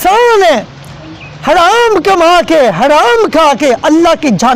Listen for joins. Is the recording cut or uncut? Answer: uncut